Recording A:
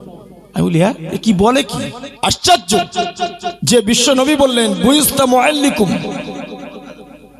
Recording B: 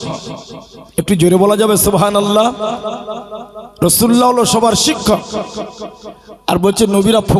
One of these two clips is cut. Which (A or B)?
A